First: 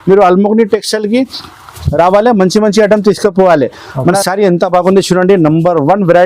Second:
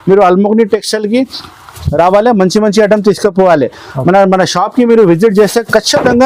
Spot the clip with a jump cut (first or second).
first